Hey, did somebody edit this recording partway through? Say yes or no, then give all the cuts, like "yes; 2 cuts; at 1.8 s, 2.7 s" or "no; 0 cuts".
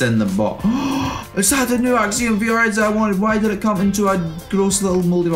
no; 0 cuts